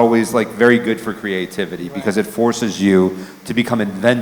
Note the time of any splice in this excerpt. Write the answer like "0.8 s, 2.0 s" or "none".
none